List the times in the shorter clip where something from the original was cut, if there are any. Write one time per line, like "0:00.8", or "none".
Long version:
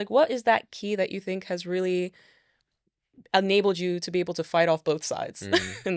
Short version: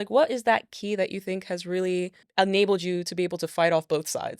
0:02.2